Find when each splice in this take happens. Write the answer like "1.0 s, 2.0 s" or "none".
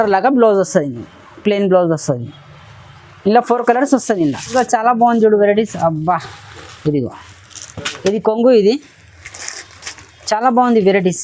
4.5 s